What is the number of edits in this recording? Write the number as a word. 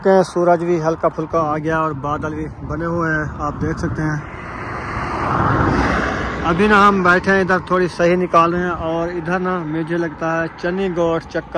zero